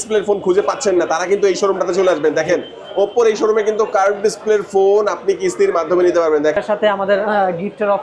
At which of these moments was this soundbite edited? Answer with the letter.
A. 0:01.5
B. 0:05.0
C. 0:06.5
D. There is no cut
C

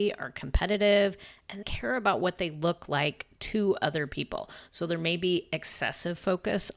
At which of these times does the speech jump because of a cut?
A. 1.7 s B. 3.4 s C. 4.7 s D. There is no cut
A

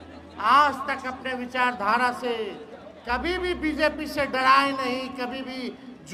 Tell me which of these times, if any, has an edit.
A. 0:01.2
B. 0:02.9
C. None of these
C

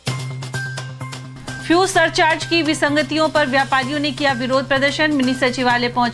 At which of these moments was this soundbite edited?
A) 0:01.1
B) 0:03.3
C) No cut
A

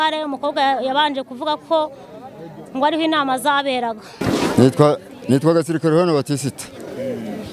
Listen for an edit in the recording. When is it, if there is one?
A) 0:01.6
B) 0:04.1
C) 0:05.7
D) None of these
B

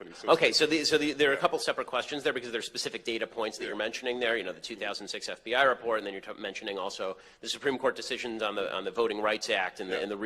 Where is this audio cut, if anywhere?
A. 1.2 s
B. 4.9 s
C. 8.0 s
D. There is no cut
C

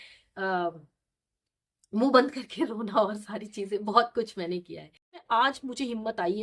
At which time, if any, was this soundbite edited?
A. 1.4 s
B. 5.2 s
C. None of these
B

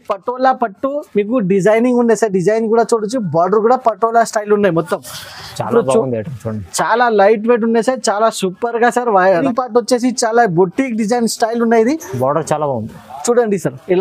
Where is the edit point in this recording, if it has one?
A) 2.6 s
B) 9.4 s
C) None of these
B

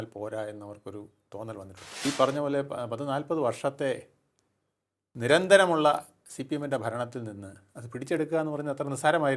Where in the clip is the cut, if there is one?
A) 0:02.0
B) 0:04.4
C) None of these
A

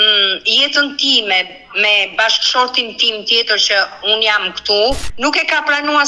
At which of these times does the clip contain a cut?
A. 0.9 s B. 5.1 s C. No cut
B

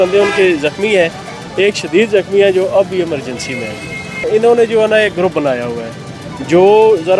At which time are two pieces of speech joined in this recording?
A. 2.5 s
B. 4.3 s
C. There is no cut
B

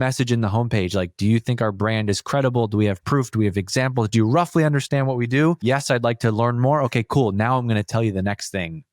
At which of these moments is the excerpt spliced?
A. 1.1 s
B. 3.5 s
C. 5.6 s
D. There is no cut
C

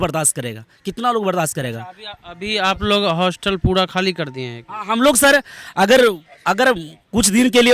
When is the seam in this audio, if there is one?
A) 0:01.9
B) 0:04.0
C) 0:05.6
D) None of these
D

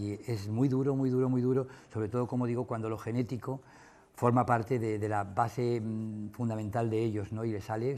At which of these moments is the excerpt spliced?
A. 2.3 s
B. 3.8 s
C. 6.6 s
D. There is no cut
D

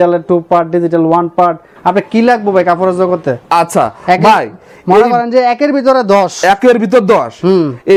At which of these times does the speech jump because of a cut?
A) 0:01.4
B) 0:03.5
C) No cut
C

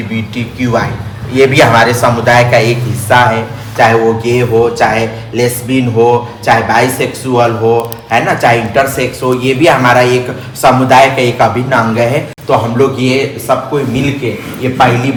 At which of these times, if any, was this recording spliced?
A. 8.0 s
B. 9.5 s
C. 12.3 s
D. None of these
D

